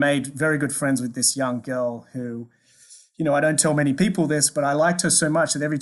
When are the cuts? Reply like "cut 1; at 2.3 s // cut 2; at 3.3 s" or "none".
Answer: none